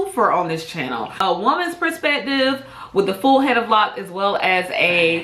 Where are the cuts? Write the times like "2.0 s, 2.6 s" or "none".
1.1 s

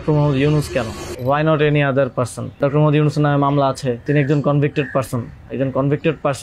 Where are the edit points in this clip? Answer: 1.0 s, 2.6 s, 4.0 s

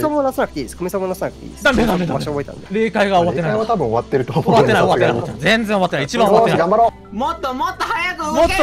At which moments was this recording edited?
2.6 s, 7.0 s

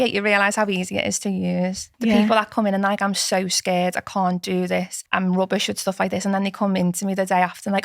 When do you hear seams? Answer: 1.9 s, 5.0 s

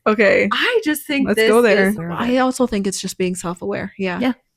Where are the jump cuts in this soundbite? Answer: 2.1 s

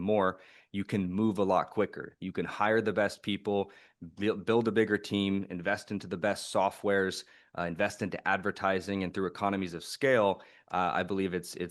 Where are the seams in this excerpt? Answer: none

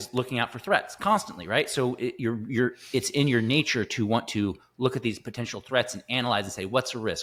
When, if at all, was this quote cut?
none

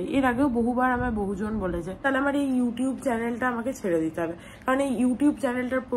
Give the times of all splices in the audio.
2.0 s

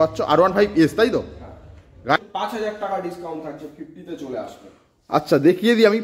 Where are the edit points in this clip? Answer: 2.2 s

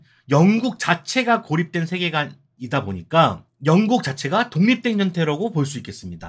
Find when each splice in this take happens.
none

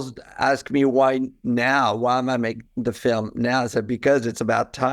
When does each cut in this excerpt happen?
none

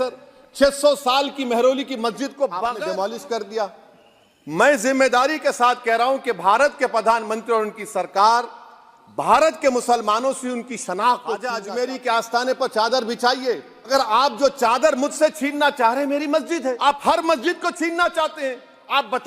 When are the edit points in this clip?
2.7 s, 11.6 s, 13.9 s, 16.8 s

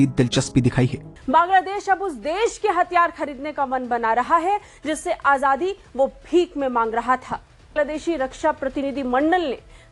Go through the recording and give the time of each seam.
1.1 s, 7.7 s

